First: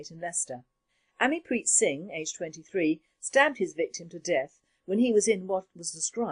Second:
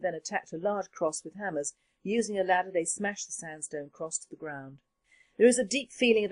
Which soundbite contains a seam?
first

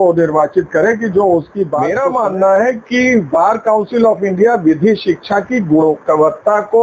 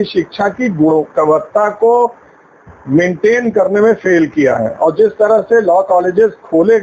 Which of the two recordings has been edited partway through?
first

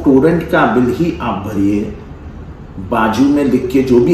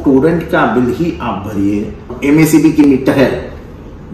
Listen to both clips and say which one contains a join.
second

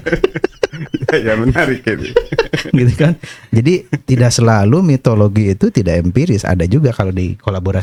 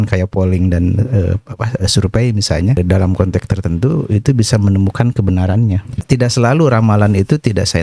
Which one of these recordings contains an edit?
second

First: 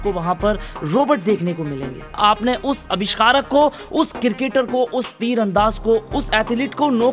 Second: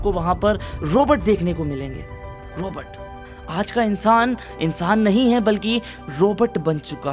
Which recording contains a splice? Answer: first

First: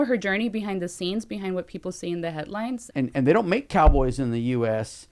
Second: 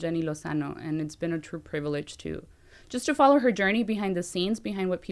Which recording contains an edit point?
first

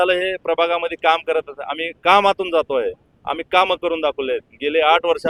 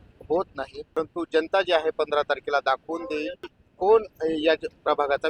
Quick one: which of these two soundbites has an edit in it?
second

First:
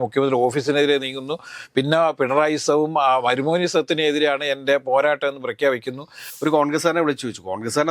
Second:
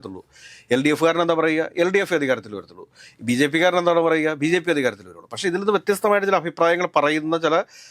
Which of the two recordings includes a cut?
first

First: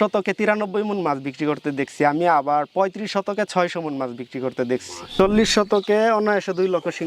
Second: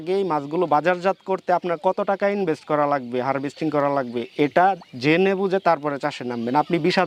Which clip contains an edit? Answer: first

